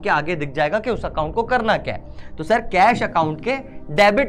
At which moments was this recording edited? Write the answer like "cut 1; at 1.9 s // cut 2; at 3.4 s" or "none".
none